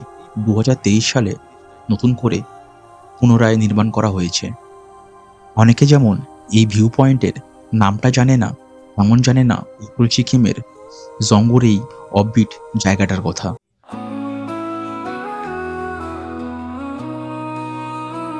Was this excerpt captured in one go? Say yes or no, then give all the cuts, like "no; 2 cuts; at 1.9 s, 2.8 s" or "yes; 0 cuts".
no; 1 cut; at 13.7 s